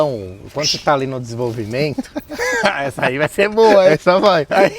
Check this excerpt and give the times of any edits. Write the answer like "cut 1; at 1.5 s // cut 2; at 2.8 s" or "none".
none